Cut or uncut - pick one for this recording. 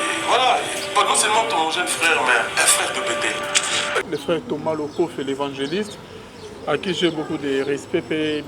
cut